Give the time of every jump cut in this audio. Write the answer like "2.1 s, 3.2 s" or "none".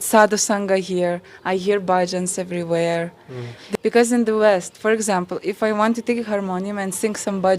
3.6 s